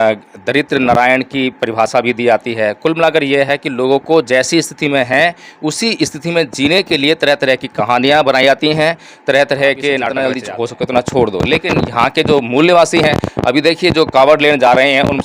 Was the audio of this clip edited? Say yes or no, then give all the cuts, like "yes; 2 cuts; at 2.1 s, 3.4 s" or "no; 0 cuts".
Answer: yes; 1 cut; at 10.3 s